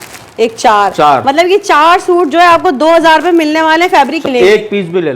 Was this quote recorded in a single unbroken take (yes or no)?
no